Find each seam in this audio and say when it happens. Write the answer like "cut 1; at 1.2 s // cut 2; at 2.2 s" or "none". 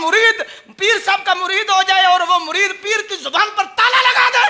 none